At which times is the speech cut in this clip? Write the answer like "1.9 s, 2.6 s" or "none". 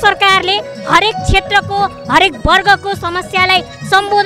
none